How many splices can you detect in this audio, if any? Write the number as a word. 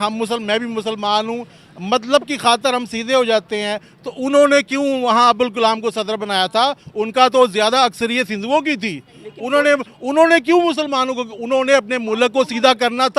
zero